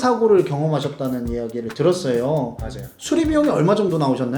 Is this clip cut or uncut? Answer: cut